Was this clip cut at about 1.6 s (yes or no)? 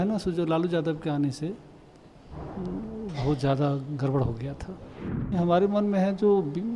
no